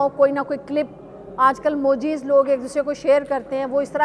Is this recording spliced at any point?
no; 0 cuts

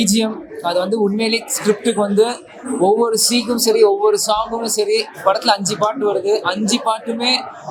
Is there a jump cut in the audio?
no; 0 cuts

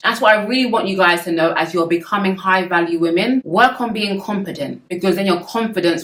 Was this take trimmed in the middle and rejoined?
no; 0 cuts

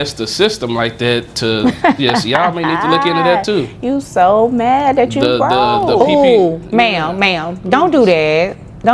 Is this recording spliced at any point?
no; 0 cuts

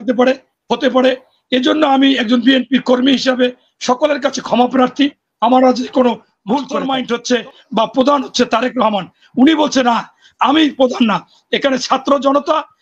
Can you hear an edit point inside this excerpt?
yes; 1 cut; at 6.8 s

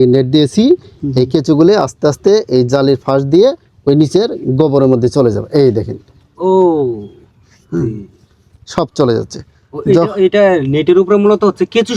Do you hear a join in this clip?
no; 0 cuts

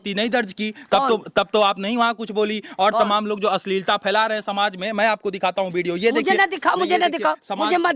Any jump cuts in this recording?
no; 0 cuts

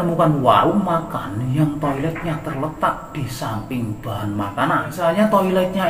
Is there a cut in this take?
yes; 1 cut; at 4.9 s

